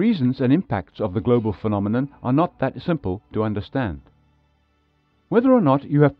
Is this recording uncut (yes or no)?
yes